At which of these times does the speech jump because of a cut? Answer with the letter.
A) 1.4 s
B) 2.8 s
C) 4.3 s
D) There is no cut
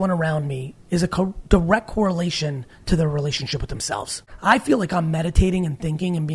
C